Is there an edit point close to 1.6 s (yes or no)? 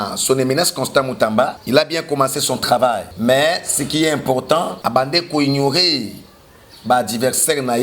yes